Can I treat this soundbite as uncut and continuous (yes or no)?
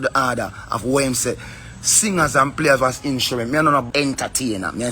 no